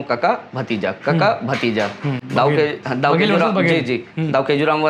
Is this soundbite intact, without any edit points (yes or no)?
yes